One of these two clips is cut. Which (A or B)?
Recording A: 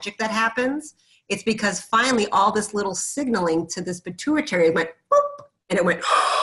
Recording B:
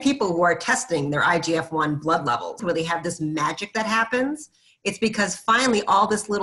B